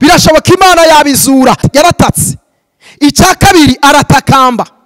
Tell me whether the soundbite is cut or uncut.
cut